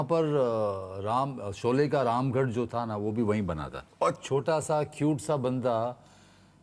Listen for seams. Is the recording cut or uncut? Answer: cut